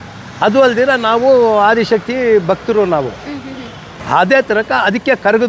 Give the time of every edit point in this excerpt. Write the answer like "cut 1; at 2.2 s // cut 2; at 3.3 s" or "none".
cut 1; at 4.0 s

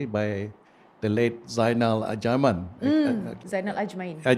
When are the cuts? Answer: cut 1; at 3.3 s

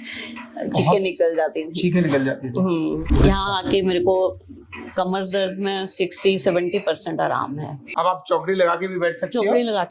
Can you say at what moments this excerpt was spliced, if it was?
cut 1; at 3.0 s // cut 2; at 7.8 s

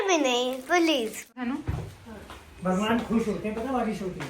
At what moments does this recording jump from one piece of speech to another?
cut 1; at 1.4 s

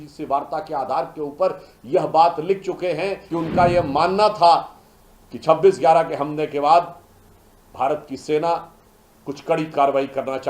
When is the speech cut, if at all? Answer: cut 1; at 3.2 s

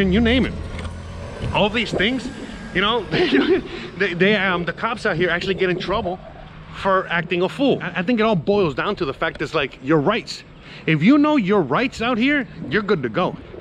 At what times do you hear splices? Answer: cut 1; at 7.9 s

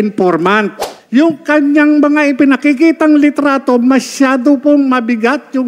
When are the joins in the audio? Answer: cut 1; at 0.9 s

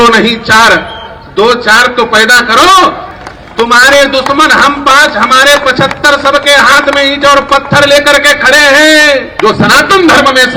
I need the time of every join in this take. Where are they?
cut 1; at 3.1 s // cut 2; at 9.3 s

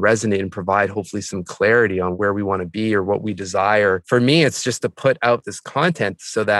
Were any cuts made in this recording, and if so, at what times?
cut 1; at 2.1 s // cut 2; at 4.0 s // cut 3; at 5.6 s

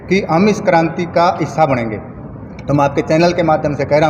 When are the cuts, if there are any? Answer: none

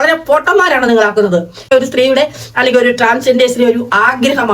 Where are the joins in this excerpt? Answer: cut 1; at 1.7 s

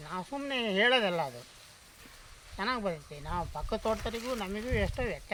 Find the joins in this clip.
none

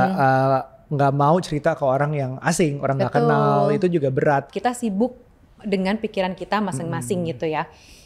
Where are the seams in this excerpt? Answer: cut 1; at 4.5 s

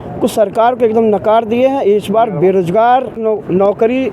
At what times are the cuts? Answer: cut 1; at 3.2 s

